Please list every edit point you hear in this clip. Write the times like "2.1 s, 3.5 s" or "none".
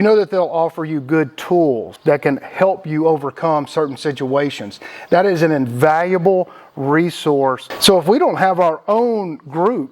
1.9 s, 7.7 s